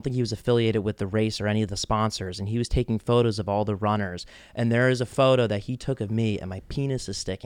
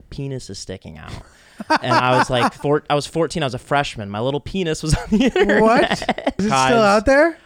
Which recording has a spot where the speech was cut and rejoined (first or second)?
second